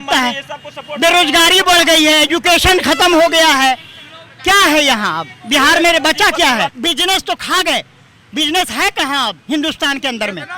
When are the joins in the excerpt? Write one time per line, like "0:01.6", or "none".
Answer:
0:06.8